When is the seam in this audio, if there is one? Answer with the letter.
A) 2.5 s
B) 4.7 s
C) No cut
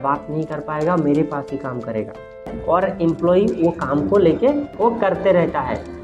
A